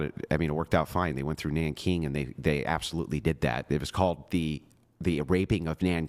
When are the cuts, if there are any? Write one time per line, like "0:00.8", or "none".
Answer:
none